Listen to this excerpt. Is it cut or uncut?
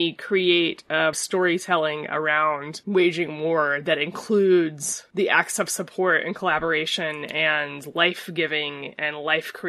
cut